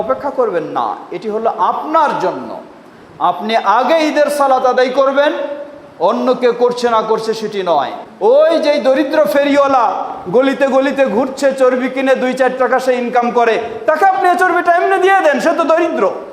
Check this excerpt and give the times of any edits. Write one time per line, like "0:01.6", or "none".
0:08.0